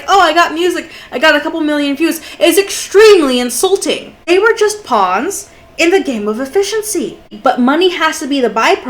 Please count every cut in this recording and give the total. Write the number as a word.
two